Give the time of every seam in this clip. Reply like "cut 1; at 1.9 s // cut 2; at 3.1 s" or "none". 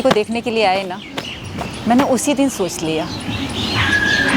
none